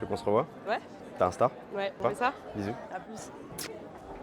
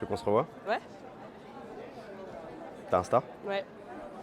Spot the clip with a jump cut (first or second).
first